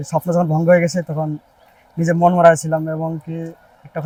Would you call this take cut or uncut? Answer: uncut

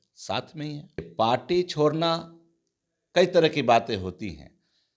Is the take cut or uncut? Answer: cut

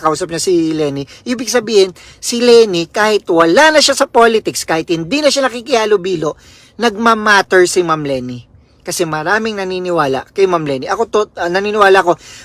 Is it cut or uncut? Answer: uncut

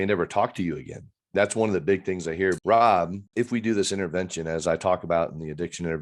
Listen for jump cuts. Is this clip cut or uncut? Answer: cut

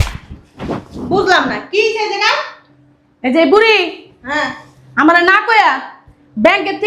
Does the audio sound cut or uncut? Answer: uncut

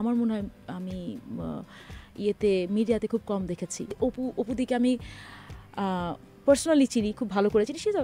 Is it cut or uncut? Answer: cut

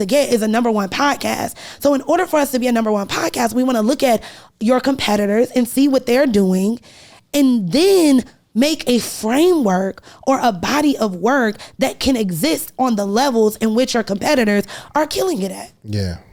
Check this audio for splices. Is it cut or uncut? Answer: uncut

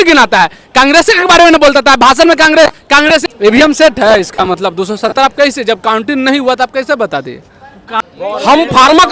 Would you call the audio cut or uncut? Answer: cut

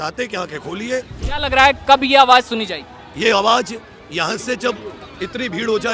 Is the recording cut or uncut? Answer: cut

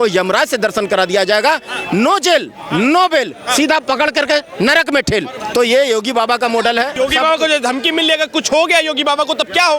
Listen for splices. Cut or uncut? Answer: cut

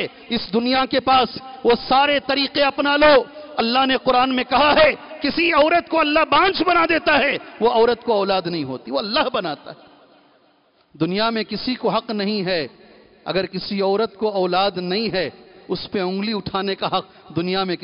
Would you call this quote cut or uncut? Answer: uncut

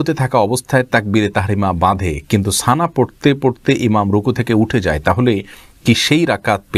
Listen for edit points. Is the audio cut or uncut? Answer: uncut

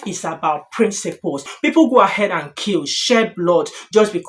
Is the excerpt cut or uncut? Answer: cut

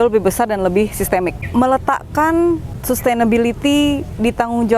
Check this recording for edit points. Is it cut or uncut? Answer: cut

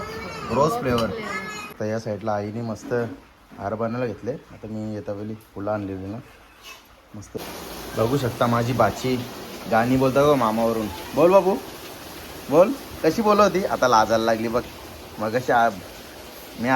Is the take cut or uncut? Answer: cut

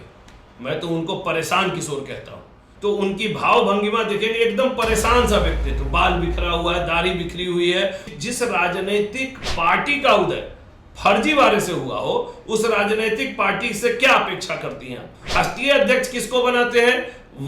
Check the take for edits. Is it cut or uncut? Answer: cut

